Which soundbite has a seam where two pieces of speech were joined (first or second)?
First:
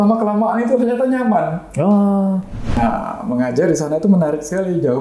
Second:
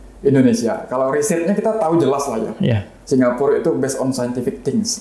first